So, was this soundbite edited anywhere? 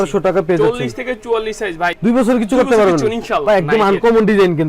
yes; 2 cuts; at 2.0 s, 3.4 s

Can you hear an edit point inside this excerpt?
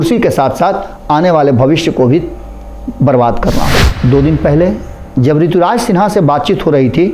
yes; 1 cut; at 3.9 s

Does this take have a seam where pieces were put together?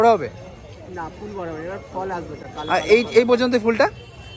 no; 0 cuts

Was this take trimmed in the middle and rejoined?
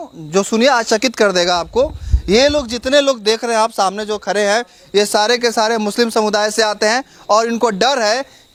no; 0 cuts

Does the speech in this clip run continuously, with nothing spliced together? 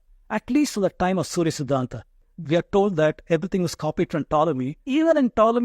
no; 2 cuts; at 2.2 s, 4.8 s

